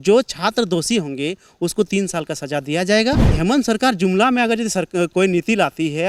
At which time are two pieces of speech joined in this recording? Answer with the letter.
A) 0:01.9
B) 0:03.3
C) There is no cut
B